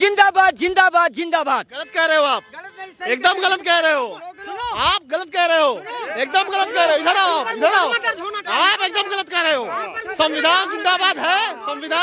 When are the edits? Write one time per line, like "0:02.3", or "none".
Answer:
none